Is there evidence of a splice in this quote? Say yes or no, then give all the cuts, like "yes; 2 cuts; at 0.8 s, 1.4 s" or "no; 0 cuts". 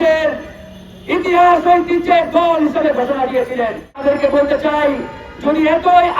yes; 1 cut; at 4.0 s